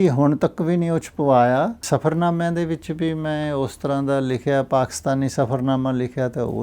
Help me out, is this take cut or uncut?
cut